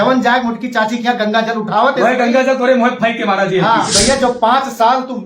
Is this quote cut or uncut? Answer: cut